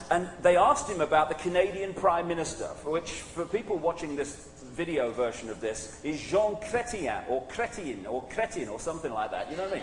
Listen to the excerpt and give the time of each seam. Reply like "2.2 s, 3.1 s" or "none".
1.1 s